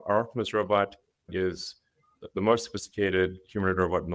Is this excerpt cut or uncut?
uncut